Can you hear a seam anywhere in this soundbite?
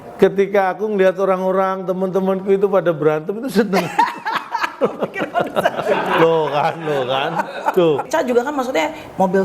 yes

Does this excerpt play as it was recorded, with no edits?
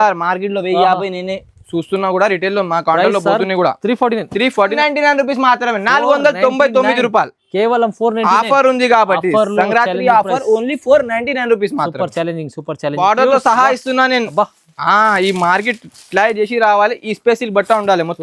no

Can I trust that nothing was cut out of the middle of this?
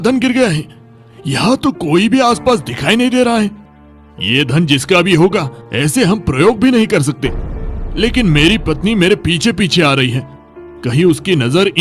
yes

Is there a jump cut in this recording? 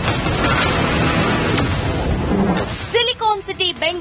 yes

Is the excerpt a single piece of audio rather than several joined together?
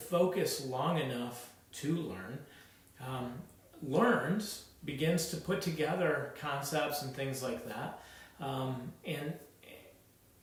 yes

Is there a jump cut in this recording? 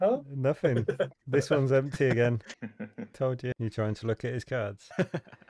yes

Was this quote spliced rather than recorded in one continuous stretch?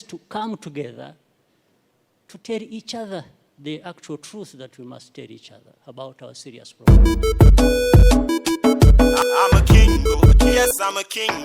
yes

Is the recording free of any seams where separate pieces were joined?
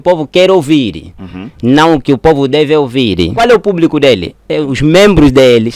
no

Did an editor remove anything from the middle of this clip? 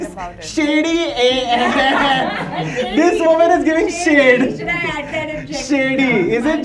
no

